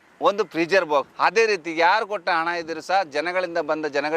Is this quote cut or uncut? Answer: cut